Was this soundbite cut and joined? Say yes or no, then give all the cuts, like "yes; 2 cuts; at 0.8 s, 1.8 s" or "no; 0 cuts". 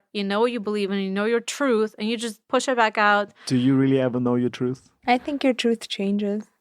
yes; 2 cuts; at 2.4 s, 4.9 s